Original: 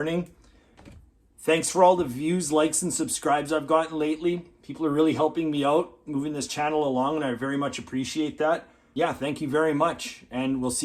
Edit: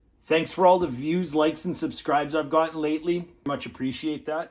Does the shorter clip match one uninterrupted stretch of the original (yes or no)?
no